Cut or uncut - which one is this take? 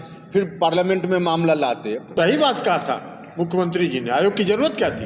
cut